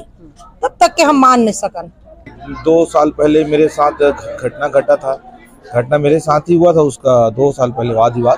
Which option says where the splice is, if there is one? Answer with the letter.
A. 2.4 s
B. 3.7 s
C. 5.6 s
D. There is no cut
A